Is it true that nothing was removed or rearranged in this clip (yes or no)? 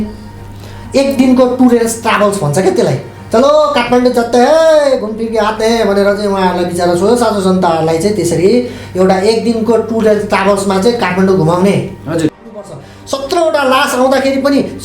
no